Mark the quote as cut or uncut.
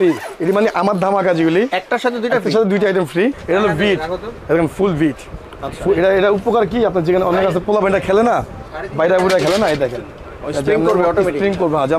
cut